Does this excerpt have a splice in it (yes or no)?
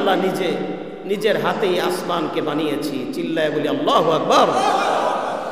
no